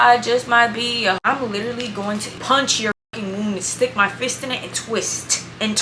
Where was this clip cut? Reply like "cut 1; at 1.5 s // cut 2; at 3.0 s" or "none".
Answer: cut 1; at 1.2 s